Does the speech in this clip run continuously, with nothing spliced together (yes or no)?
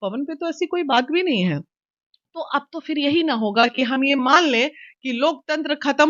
yes